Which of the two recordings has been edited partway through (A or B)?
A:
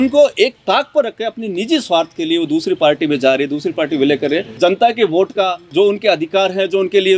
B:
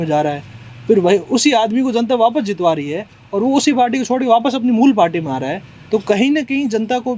A